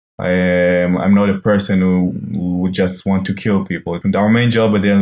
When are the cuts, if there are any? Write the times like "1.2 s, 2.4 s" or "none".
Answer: 4.0 s